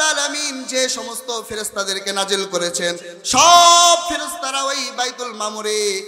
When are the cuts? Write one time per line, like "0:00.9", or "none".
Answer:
none